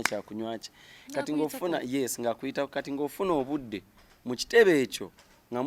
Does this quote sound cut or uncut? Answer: uncut